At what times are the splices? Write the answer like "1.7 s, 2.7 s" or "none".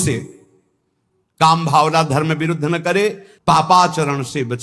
3.3 s